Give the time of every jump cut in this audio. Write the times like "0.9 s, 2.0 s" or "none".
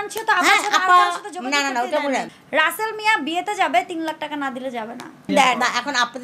2.3 s, 5.2 s